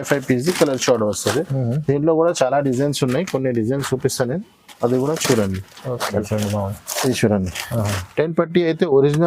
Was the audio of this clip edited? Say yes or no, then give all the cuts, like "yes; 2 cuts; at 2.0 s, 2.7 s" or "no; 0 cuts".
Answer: yes; 1 cut; at 6.2 s